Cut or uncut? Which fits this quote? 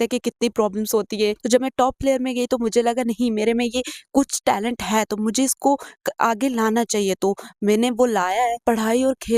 cut